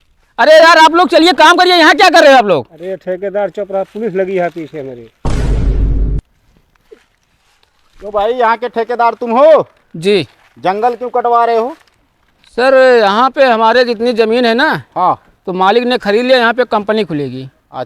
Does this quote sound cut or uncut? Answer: cut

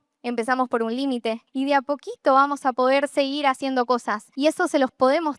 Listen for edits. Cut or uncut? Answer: cut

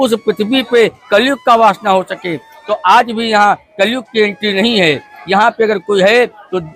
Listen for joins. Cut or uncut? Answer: uncut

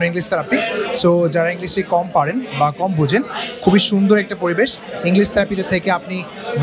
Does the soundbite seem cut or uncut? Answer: uncut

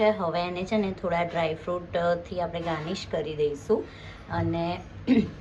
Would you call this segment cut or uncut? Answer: uncut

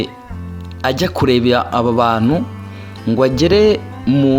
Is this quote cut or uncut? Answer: uncut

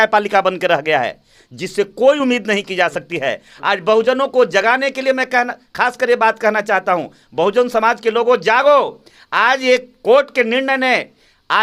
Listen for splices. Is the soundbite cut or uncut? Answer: uncut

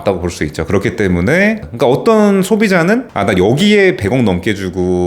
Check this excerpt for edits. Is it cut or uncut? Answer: cut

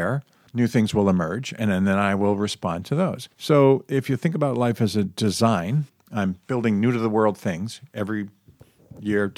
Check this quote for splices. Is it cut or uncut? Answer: uncut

